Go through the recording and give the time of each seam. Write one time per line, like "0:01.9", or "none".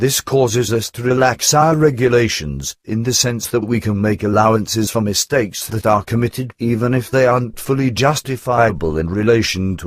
0:02.7